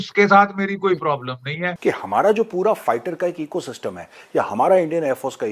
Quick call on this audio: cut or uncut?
cut